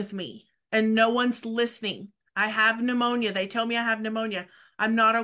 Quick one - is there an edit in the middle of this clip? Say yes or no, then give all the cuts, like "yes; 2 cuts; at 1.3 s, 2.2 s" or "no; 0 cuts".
no; 0 cuts